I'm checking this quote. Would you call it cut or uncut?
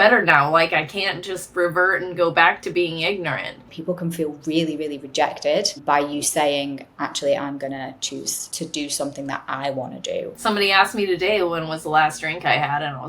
cut